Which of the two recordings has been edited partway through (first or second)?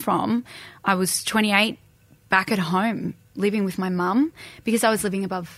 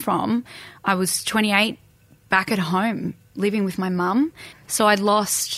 second